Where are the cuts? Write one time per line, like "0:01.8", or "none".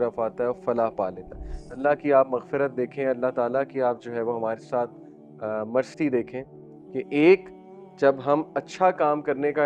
0:01.8